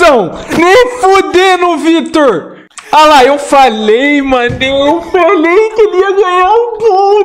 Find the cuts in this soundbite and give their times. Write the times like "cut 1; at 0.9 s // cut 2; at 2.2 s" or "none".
none